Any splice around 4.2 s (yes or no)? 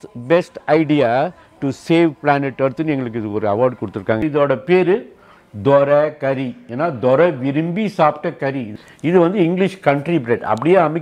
yes